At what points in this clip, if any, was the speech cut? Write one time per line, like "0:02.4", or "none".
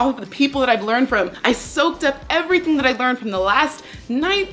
0:01.1